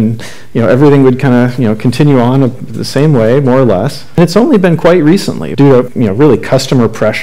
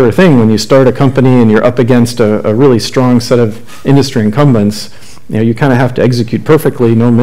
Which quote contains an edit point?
first; 2 cuts; at 4.2 s, 5.6 s

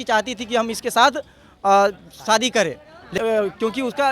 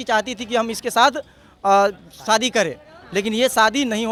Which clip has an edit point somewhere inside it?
first; 1 cut; at 3.2 s

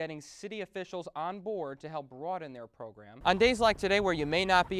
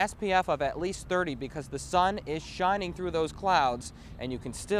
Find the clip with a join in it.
first; 1 cut; at 3.1 s

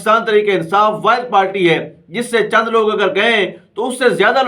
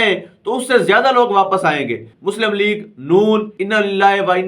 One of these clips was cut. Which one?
second; 2 cuts; at 2.1 s, 3.5 s

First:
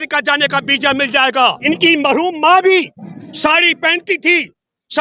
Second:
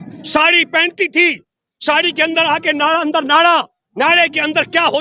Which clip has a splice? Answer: first; 1 cut; at 1.6 s

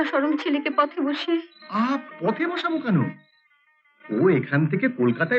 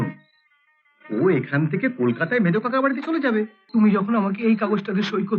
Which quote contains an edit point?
second; 1 cut; at 3.6 s

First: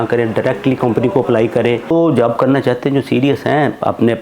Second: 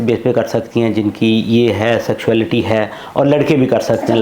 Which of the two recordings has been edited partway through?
first; 1 cut; at 1.9 s

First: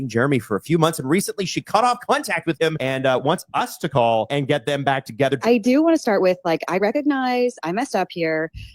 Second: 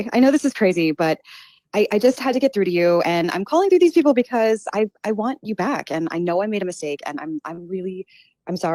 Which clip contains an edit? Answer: first; 3 cuts; at 2.8 s, 4.3 s, 5.4 s

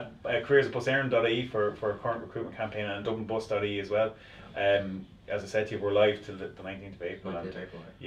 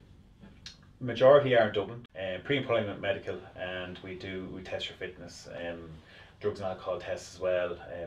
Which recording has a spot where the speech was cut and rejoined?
second; 1 cut; at 2.0 s

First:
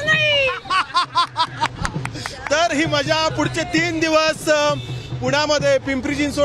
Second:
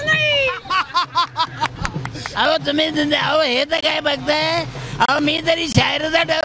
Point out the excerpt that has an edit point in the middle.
second; 1 cut; at 2.3 s

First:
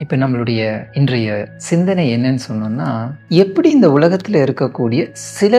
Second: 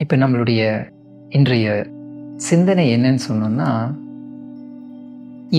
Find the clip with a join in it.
first; 2 cuts; at 1.2 s, 3.1 s

